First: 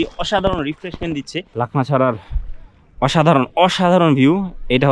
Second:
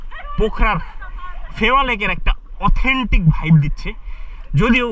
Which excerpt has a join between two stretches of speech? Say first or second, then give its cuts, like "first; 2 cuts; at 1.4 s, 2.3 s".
first; 1 cut; at 1.5 s